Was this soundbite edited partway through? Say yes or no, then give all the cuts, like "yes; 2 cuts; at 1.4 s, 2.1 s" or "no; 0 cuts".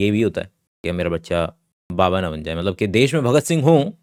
no; 0 cuts